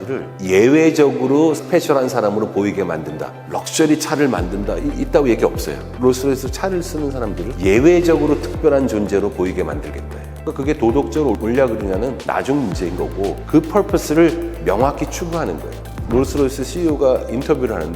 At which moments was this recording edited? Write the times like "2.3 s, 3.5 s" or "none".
11.4 s